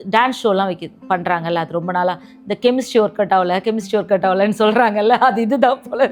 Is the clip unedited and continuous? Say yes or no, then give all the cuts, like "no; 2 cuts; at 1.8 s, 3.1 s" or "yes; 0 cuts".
yes; 0 cuts